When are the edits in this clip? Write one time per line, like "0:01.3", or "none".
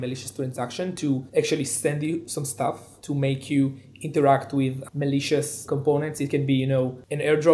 0:01.3
0:02.9
0:05.6